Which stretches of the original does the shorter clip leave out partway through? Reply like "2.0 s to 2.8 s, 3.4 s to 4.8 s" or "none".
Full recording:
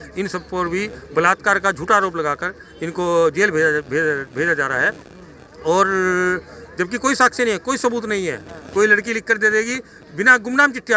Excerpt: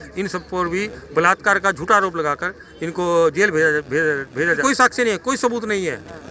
4.6 s to 7.0 s